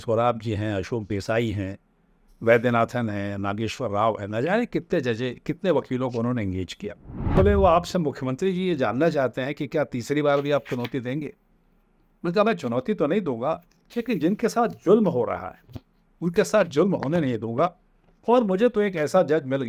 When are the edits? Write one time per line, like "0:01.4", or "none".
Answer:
0:07.3